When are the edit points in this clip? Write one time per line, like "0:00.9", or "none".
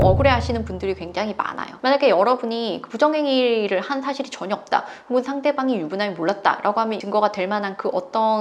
0:01.7
0:07.0